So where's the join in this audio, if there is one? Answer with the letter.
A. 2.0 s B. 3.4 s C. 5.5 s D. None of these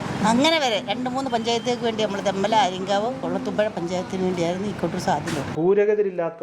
C